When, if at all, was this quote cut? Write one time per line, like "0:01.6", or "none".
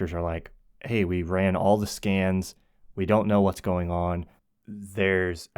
0:04.3